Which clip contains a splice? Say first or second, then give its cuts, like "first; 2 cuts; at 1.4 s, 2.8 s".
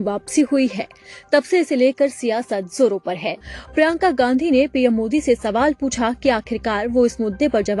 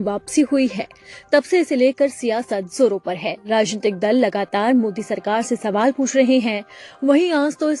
first; 1 cut; at 3.4 s